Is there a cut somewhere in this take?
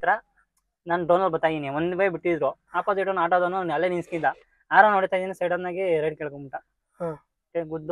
no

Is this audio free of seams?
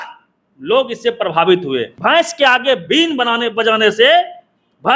no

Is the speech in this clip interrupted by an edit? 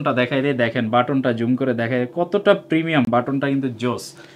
no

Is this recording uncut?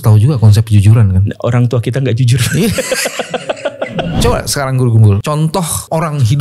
no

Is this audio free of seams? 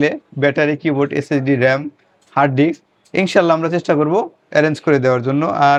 yes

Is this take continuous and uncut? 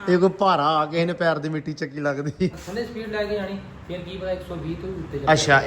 no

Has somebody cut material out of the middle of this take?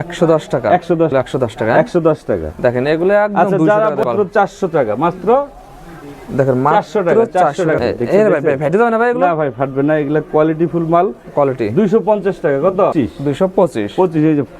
yes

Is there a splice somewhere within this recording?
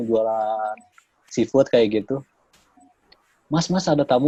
no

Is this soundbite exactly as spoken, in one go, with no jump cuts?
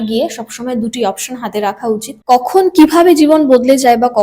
no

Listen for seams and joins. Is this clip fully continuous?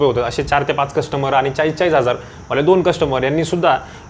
yes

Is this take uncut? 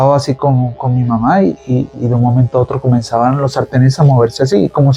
yes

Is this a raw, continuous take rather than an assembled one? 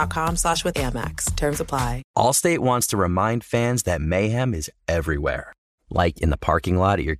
no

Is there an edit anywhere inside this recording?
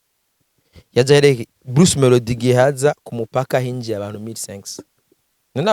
no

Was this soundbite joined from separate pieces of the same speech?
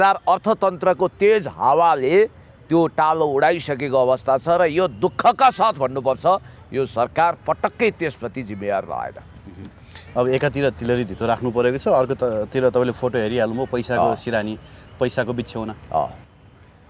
no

